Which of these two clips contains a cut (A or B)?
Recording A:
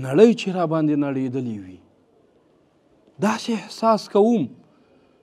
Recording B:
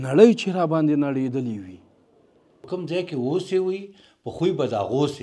B